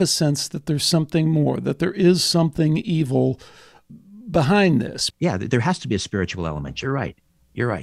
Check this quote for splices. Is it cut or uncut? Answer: cut